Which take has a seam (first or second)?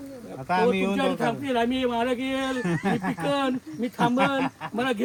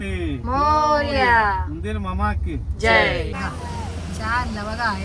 second